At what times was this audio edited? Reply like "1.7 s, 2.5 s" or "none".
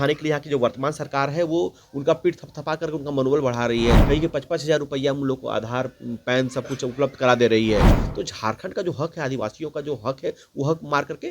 4.0 s, 7.9 s